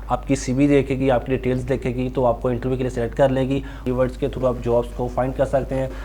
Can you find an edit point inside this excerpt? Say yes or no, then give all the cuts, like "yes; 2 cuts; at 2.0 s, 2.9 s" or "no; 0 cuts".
yes; 1 cut; at 3.8 s